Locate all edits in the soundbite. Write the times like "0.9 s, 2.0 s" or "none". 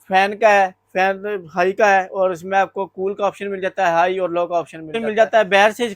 5.0 s